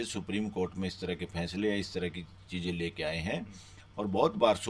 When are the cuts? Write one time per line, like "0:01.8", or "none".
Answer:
none